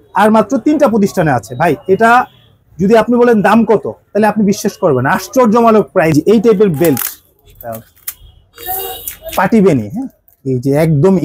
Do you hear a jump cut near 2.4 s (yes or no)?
no